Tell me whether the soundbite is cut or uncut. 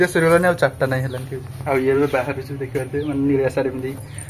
uncut